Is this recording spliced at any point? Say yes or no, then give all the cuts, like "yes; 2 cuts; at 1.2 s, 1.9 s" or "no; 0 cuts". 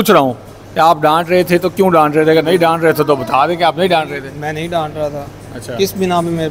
no; 0 cuts